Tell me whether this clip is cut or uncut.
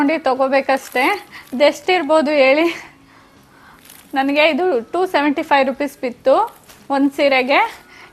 uncut